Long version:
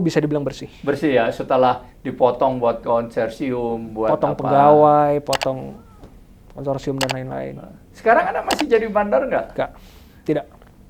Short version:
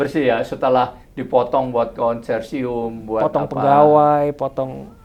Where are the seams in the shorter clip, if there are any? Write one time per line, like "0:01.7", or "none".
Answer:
none